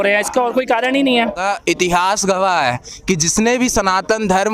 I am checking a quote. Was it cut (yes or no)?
yes